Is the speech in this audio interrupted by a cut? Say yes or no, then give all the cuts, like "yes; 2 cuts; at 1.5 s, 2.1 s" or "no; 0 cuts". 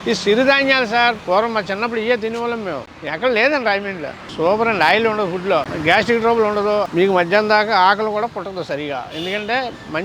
yes; 4 cuts; at 1.2 s, 2.9 s, 4.2 s, 5.7 s